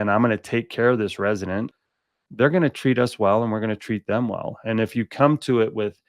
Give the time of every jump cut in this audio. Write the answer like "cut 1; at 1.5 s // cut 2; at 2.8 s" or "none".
cut 1; at 1.7 s